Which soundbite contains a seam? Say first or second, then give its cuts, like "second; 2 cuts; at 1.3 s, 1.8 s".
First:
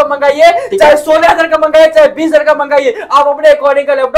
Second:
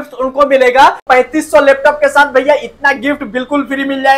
second; 1 cut; at 1.0 s